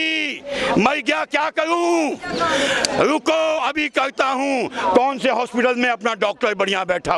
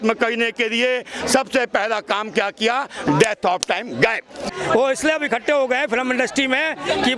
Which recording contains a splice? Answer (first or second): second